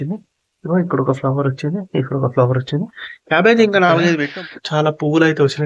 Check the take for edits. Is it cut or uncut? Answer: cut